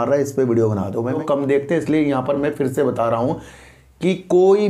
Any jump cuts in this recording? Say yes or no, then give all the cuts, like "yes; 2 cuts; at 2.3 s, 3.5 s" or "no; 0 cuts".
yes; 1 cut; at 1.2 s